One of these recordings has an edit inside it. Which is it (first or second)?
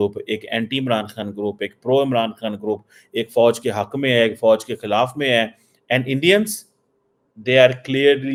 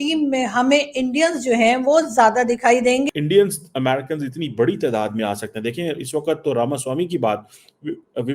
second